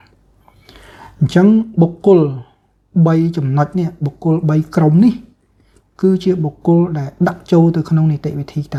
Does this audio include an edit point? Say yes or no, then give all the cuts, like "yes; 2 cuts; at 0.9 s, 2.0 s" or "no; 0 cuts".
no; 0 cuts